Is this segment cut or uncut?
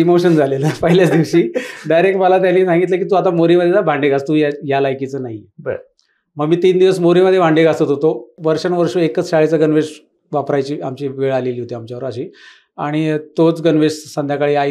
cut